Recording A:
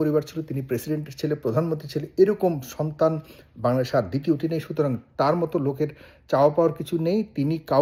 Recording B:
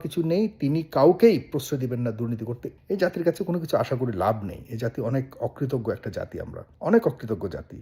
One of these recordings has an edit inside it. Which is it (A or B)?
B